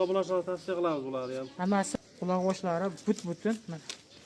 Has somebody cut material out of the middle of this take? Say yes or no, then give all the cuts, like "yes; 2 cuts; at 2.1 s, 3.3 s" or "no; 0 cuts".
yes; 1 cut; at 1.9 s